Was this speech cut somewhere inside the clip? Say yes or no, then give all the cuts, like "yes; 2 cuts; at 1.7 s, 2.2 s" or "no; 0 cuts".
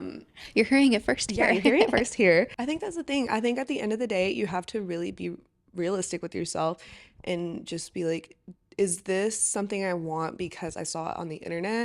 yes; 1 cut; at 2.5 s